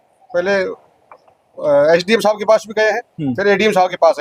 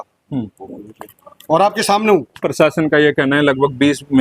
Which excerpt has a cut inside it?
second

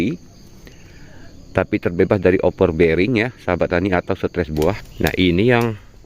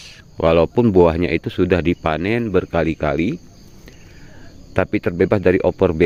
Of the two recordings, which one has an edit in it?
first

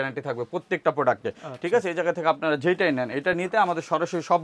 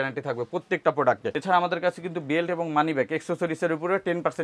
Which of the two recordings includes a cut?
second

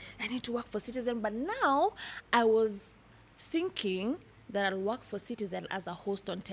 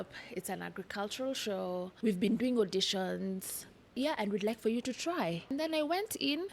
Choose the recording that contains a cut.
second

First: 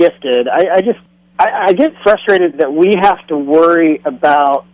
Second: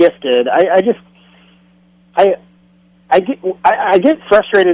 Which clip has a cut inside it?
first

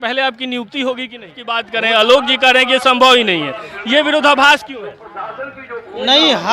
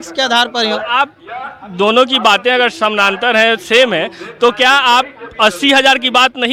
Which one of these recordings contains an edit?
first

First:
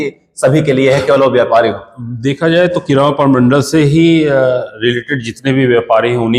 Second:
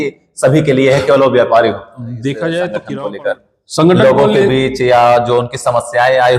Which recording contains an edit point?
second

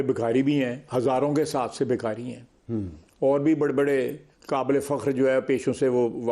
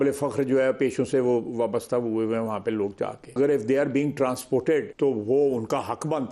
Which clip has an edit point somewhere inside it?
second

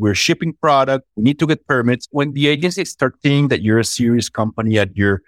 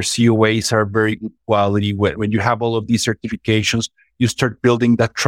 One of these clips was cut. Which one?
first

